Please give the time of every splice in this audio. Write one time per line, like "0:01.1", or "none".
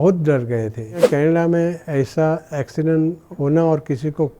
0:01.0

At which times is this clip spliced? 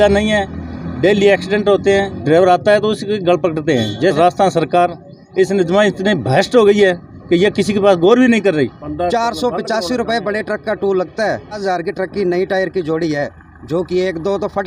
0:02.1
0:04.1
0:08.8
0:11.6

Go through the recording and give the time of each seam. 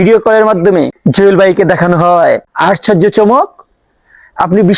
0:01.0
0:02.5

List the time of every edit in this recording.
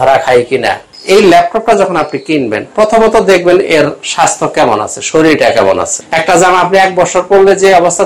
0:00.9
0:06.0

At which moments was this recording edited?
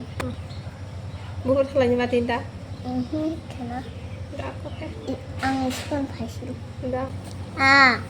0:07.2

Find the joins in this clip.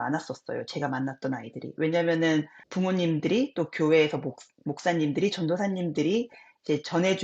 0:02.6

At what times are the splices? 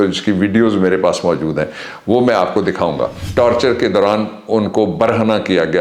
0:03.2

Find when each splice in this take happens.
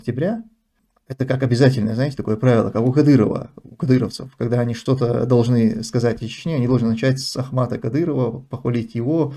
none

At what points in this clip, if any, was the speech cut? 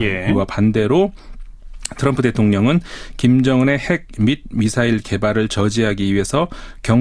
0:04.0

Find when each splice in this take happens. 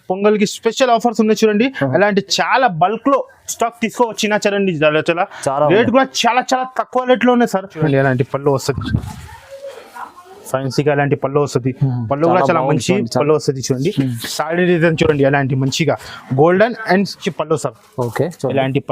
0:07.8
0:17.3

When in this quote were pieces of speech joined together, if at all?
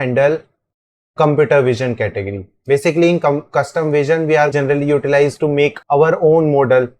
0:04.5
0:05.8

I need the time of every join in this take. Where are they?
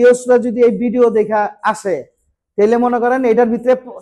none

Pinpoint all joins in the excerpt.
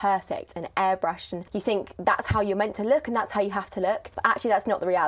0:01.3
0:04.1

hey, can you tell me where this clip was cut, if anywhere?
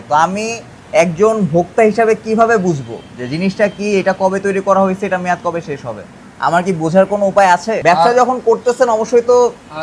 none

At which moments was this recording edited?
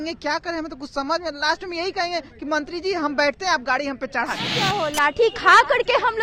0:04.6

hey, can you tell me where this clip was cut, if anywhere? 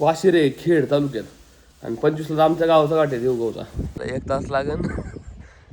0:03.9

